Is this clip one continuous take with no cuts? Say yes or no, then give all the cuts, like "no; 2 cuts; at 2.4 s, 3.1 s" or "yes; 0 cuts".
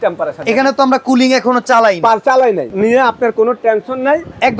no; 1 cut; at 2.7 s